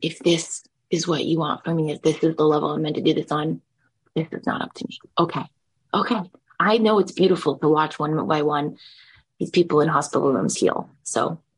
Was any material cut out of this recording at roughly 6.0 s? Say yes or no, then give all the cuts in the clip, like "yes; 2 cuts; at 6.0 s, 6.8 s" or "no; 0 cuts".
no; 0 cuts